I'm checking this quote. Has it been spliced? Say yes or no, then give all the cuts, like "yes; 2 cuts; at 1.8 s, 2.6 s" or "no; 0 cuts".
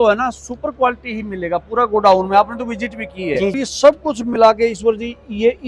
yes; 1 cut; at 3.6 s